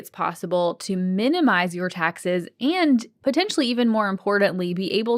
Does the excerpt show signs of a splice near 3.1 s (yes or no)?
yes